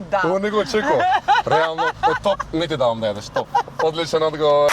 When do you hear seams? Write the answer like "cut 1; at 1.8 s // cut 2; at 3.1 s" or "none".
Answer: none